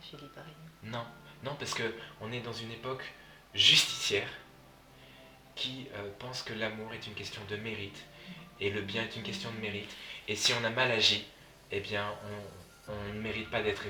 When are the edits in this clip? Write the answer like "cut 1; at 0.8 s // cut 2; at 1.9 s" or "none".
none